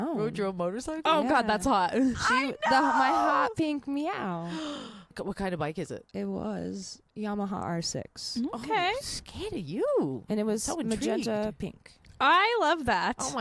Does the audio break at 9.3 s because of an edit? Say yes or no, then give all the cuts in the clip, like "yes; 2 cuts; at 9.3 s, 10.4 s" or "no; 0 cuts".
no; 2 cuts; at 5.2 s, 7.0 s